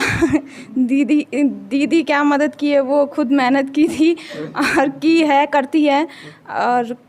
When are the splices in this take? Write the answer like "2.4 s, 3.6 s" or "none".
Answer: none